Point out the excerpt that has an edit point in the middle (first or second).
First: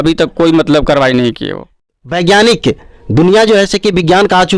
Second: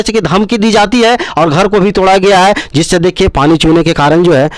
first